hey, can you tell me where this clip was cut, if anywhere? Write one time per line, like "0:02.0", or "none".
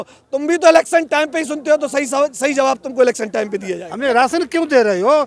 0:03.8